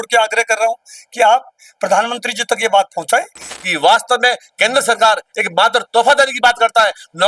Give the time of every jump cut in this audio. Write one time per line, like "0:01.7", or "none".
0:03.6